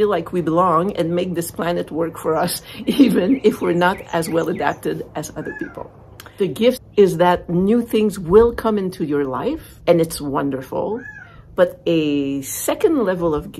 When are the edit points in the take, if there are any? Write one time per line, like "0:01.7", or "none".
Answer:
0:06.2